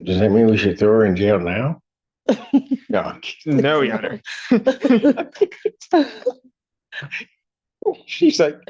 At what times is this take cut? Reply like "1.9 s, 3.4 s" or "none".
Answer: none

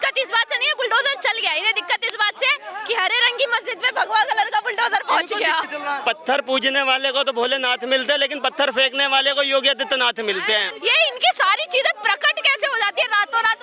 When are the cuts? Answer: 5.6 s, 10.7 s

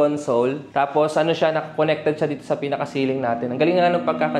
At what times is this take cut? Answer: none

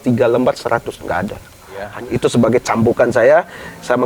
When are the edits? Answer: 1.9 s

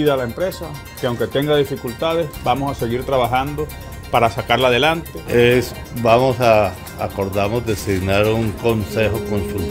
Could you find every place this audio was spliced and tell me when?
5.1 s

